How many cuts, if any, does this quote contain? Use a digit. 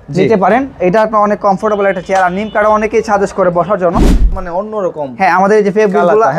1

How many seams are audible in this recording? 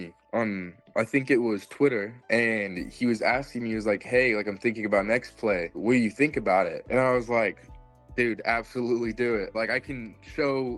0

